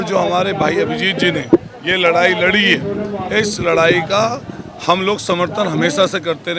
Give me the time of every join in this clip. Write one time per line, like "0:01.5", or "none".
none

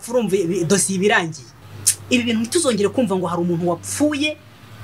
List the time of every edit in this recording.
0:01.7

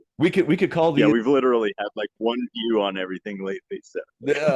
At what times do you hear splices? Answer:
none

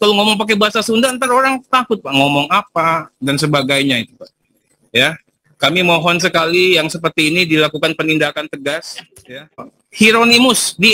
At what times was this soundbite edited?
0:09.8

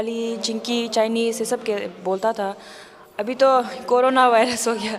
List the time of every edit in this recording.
none

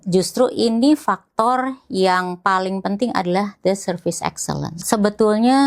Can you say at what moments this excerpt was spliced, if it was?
0:04.7

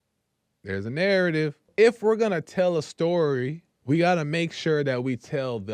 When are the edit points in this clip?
0:01.7

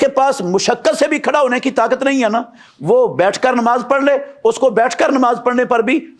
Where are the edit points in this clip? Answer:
none

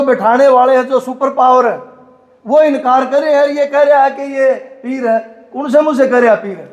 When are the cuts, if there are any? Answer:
none

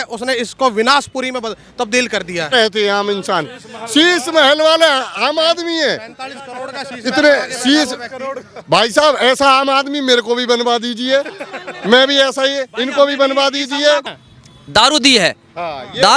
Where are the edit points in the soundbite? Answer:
0:02.5
0:14.2

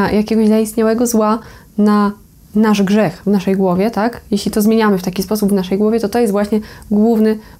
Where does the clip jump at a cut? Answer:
none

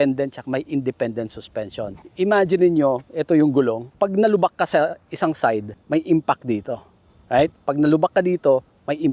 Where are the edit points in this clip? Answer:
0:03.9
0:05.7

